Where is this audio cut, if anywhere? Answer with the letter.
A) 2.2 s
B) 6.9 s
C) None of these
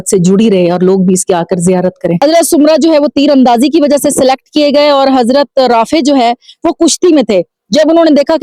A